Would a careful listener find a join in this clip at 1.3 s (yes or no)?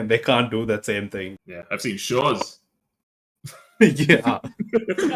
yes